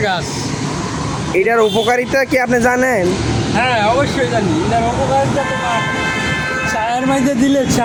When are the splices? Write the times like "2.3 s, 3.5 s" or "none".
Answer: none